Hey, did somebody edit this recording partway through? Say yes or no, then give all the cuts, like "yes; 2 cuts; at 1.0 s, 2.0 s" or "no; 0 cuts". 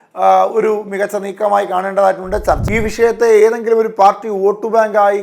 yes; 1 cut; at 2.6 s